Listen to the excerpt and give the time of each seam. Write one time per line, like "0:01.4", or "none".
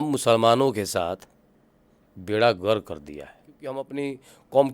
0:03.8